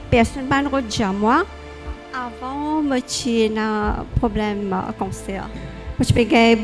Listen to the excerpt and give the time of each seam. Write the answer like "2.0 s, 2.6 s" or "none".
1.9 s